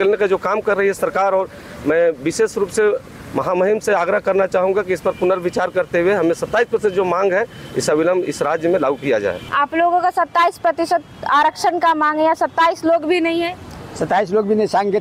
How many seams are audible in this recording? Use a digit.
1